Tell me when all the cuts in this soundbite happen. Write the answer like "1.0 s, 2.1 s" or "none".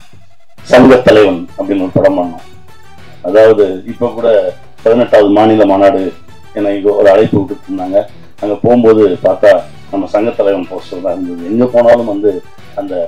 none